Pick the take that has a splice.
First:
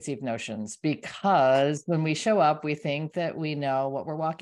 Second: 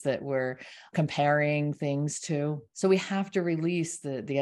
second; 2 cuts; at 0.9 s, 2.7 s

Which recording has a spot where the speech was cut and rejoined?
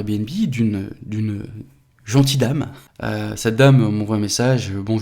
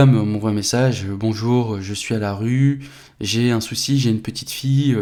first; 1 cut; at 2.8 s

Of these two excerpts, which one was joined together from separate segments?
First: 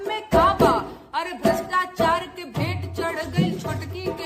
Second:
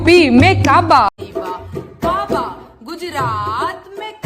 second; 1 cut; at 1.1 s

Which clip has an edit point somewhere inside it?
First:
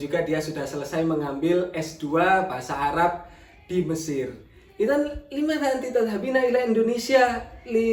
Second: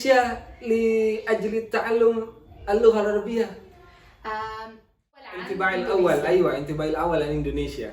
second; 1 cut; at 5.4 s

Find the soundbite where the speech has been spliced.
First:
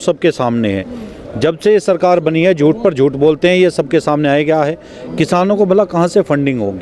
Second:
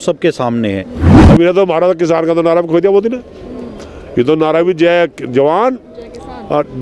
second; 1 cut; at 1.1 s

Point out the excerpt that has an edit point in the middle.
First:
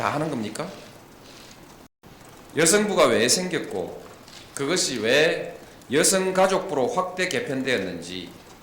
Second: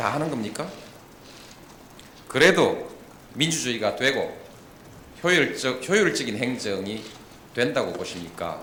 first; 1 cut; at 2.0 s

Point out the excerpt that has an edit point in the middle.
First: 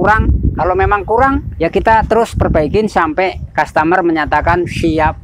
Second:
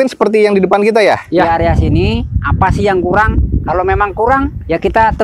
second; 1 cut; at 1.5 s

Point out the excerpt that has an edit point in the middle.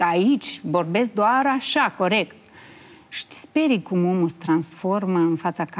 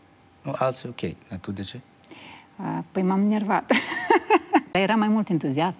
second; 1 cut; at 4.7 s

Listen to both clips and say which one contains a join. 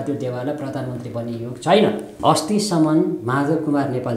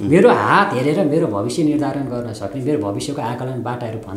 first; 1 cut; at 2.1 s

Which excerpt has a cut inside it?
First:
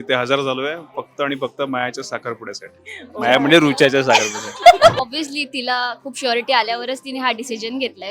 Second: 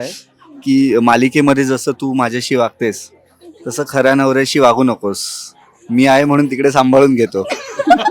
first; 1 cut; at 5.0 s

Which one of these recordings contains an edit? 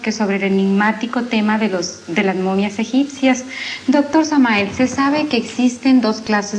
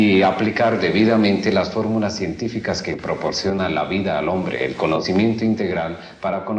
second; 1 cut; at 1.3 s

